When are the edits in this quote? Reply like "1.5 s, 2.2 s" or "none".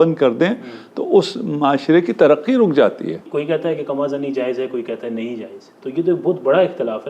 3.2 s